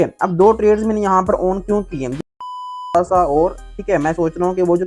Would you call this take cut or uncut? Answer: cut